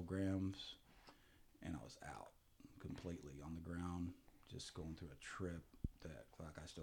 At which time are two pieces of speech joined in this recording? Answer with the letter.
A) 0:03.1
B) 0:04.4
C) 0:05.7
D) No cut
D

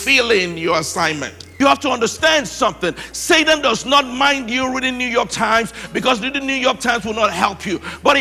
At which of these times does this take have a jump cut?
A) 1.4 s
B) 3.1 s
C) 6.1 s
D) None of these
A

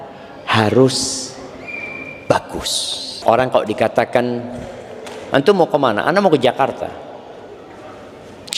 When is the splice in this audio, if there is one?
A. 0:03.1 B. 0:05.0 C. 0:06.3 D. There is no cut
A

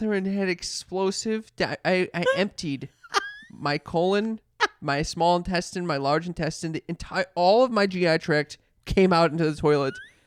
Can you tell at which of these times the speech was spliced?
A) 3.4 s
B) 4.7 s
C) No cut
C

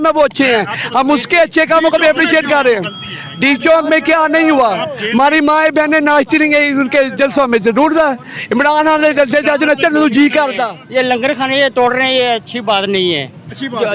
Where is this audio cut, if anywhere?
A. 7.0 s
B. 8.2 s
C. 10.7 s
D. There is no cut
C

